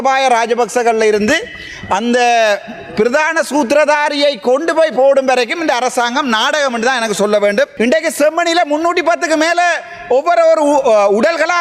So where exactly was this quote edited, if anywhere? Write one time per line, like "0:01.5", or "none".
0:07.7